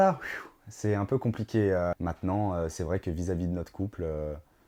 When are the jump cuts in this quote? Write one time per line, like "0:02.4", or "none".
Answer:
0:01.9